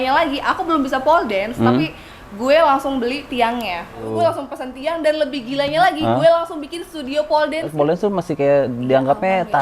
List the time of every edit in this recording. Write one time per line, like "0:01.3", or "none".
0:04.0
0:07.7